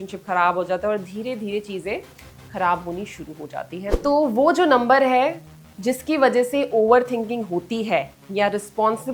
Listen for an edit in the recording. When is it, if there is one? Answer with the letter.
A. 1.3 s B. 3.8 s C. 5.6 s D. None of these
B